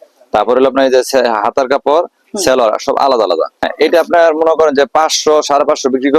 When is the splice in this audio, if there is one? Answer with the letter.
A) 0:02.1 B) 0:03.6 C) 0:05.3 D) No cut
B